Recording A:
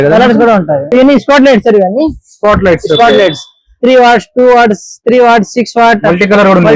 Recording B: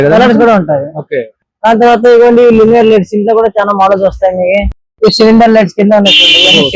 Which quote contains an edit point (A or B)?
A